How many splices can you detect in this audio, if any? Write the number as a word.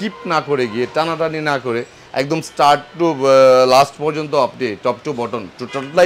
zero